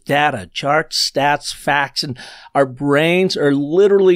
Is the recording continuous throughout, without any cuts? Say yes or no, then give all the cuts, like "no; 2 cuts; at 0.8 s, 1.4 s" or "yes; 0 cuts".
yes; 0 cuts